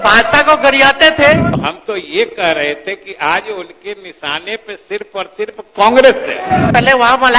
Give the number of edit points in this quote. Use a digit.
2